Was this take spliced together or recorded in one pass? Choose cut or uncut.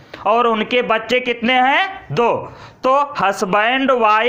uncut